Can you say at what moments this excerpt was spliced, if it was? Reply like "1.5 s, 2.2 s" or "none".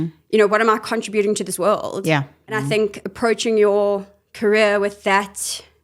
2.6 s